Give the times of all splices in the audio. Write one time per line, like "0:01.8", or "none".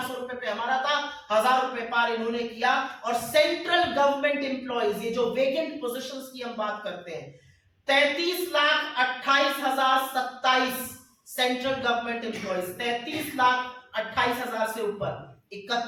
none